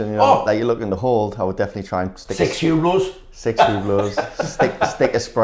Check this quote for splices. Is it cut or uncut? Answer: uncut